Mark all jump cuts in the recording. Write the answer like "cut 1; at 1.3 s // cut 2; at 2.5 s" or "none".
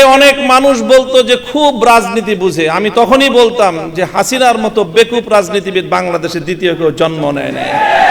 none